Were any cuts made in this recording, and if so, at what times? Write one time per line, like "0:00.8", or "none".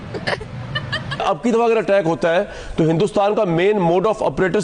0:01.2